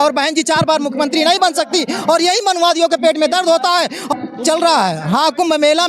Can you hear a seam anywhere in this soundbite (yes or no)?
yes